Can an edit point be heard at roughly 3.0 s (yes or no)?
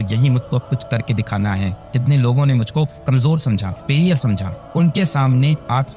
yes